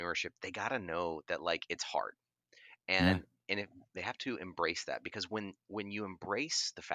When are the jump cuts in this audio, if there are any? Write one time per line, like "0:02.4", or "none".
none